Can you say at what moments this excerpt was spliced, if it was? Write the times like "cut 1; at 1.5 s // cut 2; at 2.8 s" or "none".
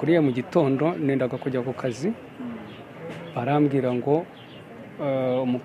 none